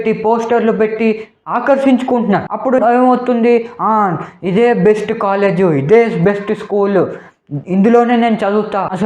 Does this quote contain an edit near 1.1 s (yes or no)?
no